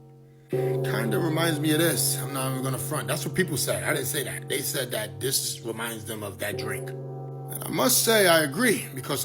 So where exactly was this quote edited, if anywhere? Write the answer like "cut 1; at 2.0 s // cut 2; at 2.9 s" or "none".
cut 1; at 1.1 s